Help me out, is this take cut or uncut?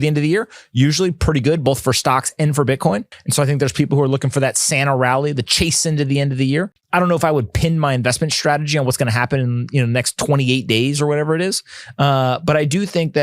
cut